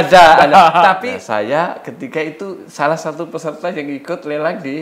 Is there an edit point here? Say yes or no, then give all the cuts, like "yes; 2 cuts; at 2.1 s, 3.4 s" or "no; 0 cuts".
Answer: yes; 1 cut; at 1.0 s